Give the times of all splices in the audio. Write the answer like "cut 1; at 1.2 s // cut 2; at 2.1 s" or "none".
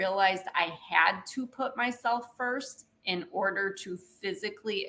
none